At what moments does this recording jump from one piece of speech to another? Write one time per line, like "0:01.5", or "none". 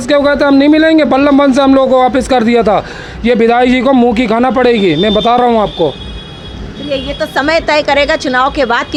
none